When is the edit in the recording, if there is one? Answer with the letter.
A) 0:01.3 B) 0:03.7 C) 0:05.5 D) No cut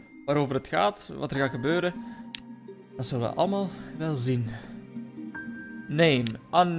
A